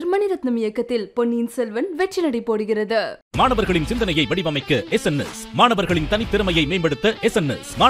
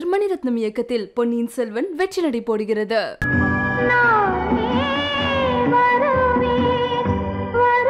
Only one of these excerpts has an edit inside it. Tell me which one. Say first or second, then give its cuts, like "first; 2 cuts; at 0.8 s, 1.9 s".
second; 1 cut; at 3.2 s